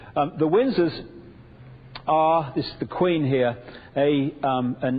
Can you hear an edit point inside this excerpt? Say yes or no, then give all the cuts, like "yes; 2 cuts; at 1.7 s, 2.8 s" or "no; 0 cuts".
no; 0 cuts